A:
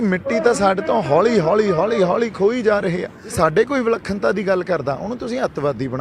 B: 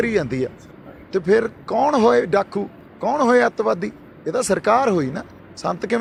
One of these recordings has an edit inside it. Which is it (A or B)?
A